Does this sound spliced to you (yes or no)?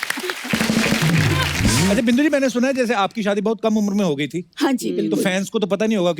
yes